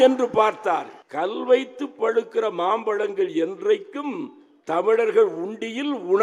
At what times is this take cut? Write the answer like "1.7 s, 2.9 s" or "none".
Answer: 1.0 s